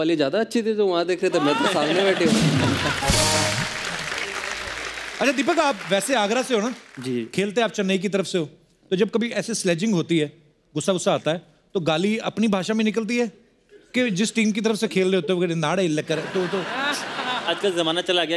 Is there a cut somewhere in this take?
no; 0 cuts

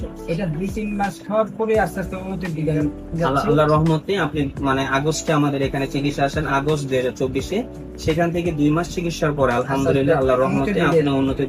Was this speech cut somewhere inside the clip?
no; 0 cuts

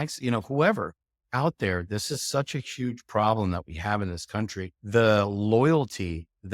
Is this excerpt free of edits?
no; 1 cut; at 4.7 s

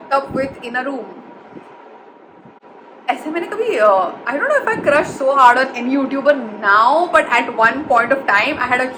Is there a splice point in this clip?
no; 0 cuts

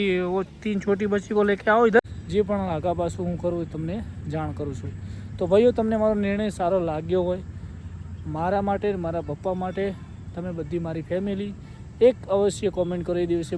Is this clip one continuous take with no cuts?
no; 1 cut; at 2.2 s

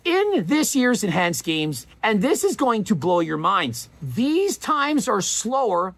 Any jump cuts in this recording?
no; 0 cuts

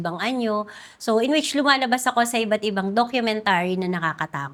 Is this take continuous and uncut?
yes; 0 cuts

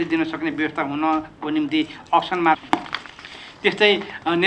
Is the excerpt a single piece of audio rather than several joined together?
yes; 0 cuts

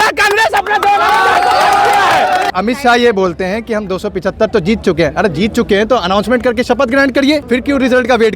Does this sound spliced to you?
yes; 2 cuts; at 2.5 s, 7.4 s

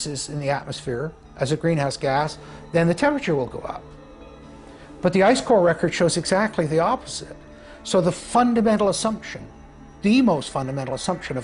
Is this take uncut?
yes; 0 cuts

